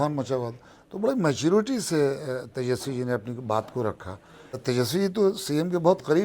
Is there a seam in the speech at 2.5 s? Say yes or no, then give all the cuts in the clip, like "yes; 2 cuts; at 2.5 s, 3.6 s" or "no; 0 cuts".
no; 1 cut; at 4.5 s